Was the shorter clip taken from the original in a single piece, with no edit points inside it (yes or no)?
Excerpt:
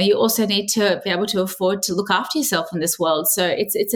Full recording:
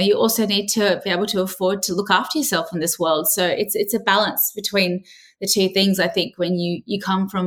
yes